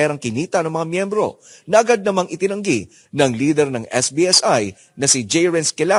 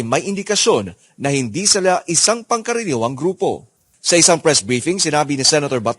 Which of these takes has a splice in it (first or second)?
second